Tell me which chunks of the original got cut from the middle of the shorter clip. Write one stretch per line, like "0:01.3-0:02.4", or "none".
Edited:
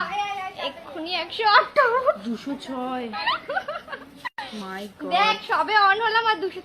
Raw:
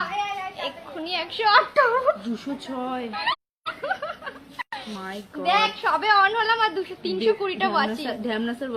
0:03.4-0:03.8